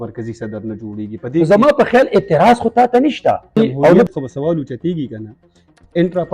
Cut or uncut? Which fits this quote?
cut